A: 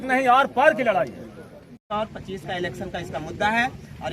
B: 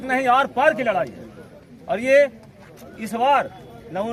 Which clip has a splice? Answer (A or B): A